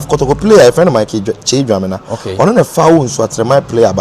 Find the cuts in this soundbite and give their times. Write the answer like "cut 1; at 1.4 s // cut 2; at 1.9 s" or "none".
none